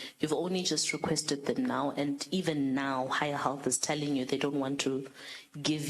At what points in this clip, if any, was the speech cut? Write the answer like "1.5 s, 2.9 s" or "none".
none